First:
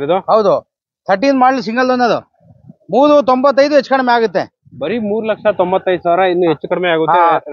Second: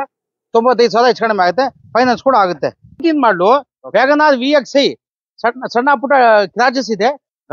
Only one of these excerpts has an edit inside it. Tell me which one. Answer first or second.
second